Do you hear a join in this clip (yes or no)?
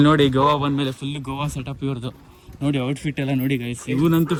no